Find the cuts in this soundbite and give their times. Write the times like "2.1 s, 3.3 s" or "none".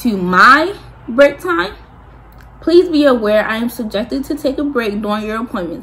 none